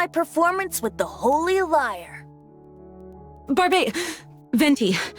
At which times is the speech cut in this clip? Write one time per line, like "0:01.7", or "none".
0:02.2
0:03.5